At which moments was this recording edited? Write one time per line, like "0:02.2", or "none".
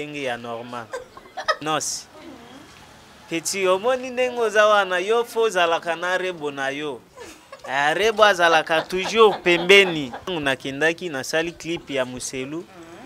0:01.6
0:10.3

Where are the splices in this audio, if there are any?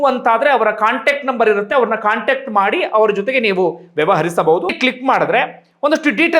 0:04.7

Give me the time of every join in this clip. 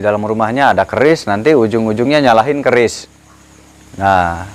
none

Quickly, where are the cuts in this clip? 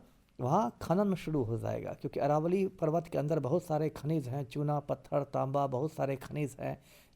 none

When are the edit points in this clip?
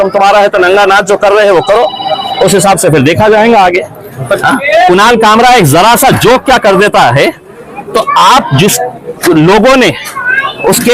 0:04.4

